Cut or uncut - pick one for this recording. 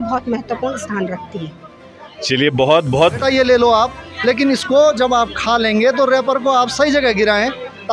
cut